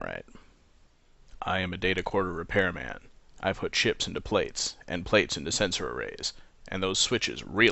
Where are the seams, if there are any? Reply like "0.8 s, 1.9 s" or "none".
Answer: 4.2 s